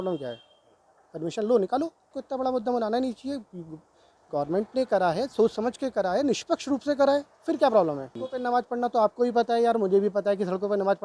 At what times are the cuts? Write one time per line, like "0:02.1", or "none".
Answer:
0:02.2
0:08.2